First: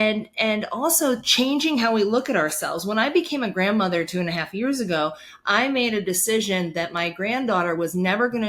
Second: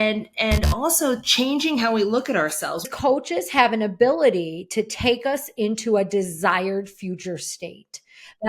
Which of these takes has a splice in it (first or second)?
second